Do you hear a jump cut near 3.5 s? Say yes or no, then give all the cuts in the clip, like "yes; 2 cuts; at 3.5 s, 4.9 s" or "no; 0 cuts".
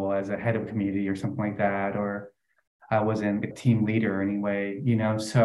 yes; 1 cut; at 3.5 s